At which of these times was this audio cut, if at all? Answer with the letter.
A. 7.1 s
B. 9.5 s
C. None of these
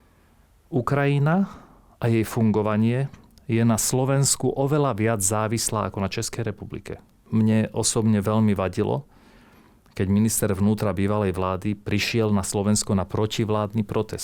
A